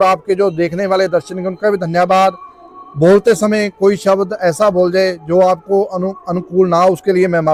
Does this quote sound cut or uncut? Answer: uncut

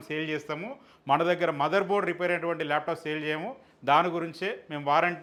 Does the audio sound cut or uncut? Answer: uncut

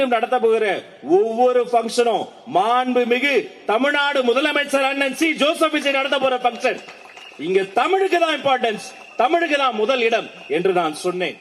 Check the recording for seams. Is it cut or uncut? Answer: uncut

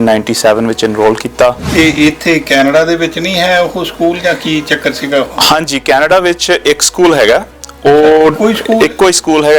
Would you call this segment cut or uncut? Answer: cut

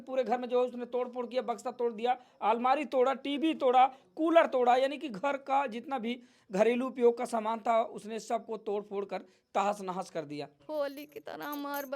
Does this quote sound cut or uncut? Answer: cut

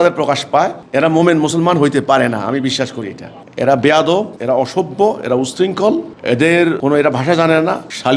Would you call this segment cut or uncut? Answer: cut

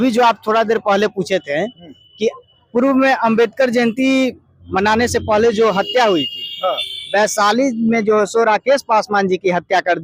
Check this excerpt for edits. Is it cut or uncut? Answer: uncut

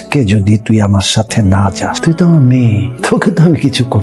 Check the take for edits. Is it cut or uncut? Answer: cut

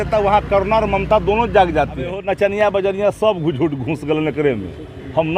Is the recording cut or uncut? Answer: cut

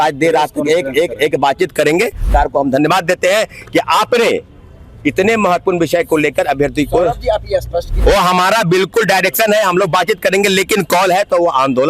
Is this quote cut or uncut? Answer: cut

